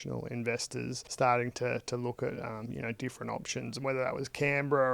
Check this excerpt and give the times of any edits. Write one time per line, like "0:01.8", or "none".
0:01.0